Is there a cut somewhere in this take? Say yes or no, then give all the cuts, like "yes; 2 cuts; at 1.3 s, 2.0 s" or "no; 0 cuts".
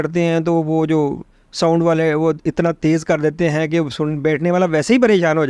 no; 0 cuts